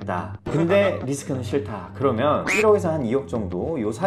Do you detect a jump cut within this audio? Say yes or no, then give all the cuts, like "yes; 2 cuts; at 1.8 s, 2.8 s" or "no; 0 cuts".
yes; 1 cut; at 2.5 s